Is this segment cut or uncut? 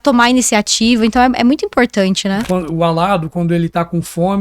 cut